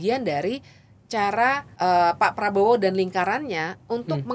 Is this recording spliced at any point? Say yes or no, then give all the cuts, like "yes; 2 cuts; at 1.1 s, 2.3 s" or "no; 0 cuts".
yes; 1 cut; at 1.7 s